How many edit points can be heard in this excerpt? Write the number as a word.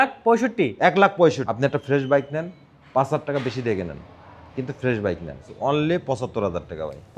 two